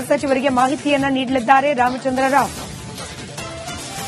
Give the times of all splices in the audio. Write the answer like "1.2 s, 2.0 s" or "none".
none